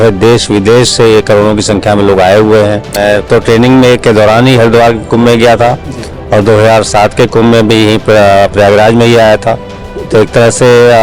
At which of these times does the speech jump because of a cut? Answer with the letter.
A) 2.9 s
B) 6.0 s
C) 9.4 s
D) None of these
A